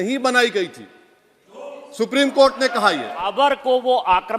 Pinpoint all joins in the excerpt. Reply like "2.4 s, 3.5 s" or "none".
3.3 s